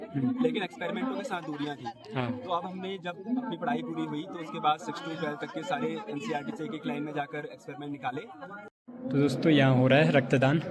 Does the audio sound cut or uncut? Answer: cut